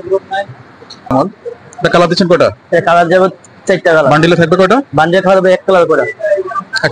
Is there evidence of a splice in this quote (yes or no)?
yes